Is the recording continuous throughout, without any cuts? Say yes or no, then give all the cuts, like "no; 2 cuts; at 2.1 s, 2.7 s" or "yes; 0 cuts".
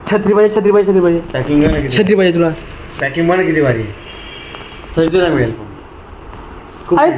no; 1 cut; at 3.0 s